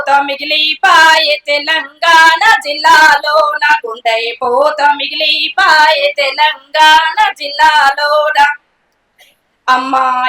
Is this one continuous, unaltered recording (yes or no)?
yes